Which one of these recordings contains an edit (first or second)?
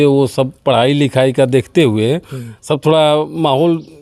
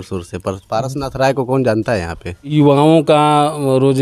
second